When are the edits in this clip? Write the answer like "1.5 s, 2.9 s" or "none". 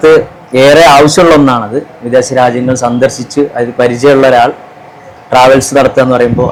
none